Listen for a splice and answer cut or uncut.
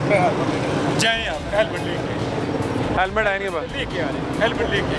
uncut